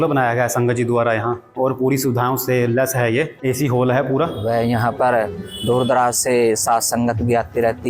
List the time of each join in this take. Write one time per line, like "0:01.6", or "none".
0:01.5
0:03.3
0:04.4

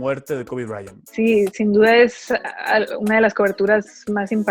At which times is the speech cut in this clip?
0:00.9

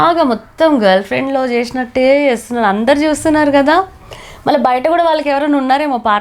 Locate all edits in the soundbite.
none

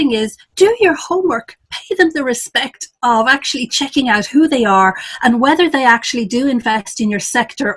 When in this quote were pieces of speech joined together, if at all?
none

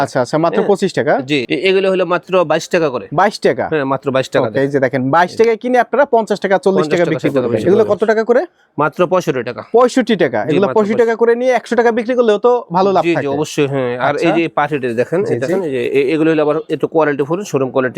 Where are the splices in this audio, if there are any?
0:01.5
0:07.6
0:15.6

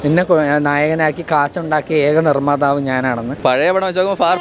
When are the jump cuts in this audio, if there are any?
0:03.3

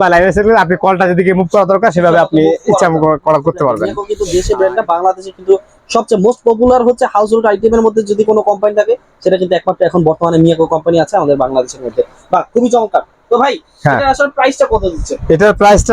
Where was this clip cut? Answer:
0:04.1

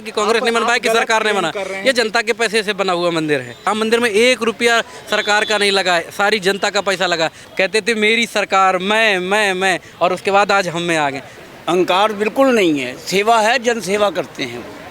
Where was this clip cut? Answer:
0:03.7
0:07.4
0:11.3

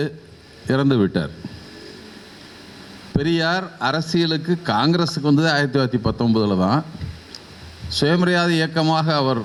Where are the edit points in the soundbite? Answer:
none

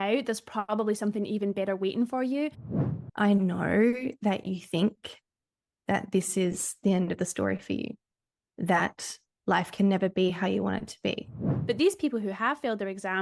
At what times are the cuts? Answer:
0:02.7
0:11.5

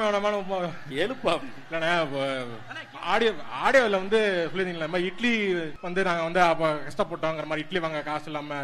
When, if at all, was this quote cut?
0:05.8

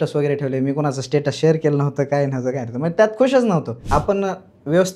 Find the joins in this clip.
0:03.8

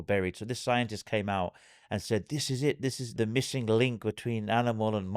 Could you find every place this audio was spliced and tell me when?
0:03.1

